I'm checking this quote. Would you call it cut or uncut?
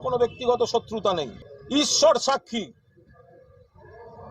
cut